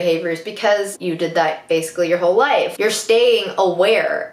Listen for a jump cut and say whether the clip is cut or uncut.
cut